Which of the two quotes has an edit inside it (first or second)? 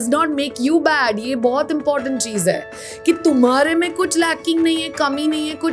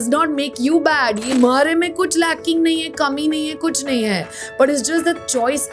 second